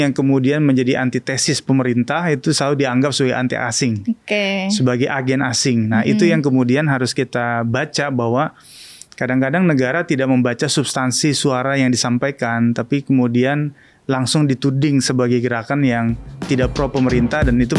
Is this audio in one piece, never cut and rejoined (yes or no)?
yes